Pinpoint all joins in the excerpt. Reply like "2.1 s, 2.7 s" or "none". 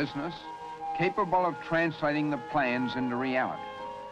none